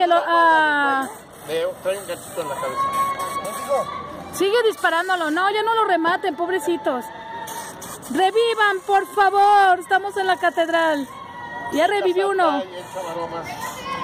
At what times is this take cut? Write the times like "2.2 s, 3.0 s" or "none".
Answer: none